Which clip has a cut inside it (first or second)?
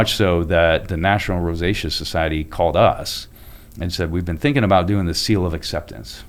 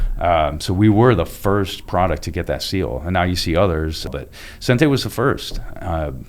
second